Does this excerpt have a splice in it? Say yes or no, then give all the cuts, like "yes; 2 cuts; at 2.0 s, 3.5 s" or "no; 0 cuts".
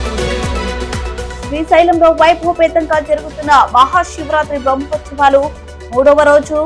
no; 0 cuts